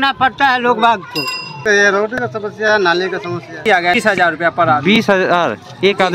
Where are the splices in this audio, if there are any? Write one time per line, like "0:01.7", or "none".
0:01.6
0:04.0